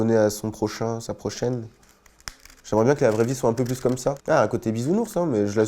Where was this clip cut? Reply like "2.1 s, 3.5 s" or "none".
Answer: 4.2 s